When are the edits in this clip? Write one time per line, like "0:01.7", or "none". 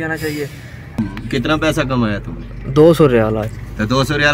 0:01.0